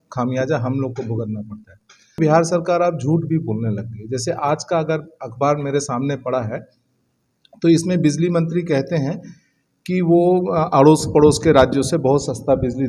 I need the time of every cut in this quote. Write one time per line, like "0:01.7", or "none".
0:02.2